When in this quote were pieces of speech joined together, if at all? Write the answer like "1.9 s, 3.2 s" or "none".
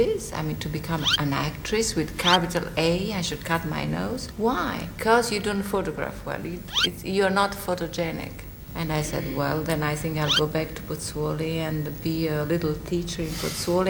none